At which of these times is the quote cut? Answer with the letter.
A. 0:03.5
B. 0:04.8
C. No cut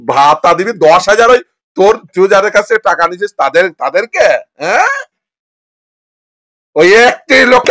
C